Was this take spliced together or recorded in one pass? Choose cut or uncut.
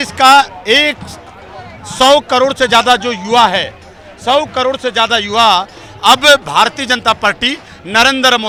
uncut